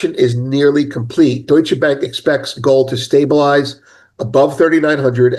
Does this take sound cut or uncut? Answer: uncut